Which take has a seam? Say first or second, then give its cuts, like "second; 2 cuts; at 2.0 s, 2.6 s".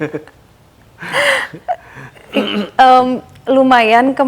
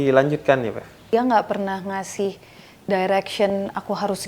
second; 1 cut; at 1.1 s